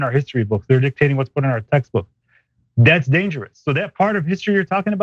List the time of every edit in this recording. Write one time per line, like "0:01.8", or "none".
none